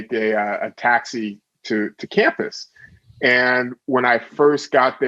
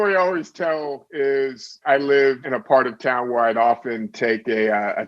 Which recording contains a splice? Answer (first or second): second